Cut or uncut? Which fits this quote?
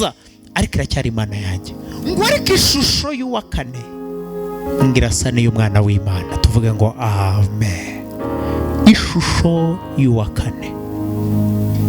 cut